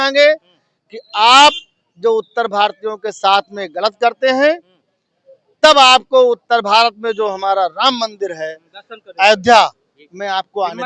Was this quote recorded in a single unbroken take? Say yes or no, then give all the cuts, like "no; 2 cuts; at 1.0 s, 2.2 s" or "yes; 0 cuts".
yes; 0 cuts